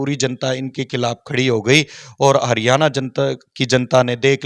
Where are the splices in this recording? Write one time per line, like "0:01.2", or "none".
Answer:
none